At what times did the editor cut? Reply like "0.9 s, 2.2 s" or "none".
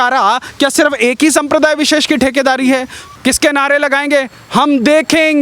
3.0 s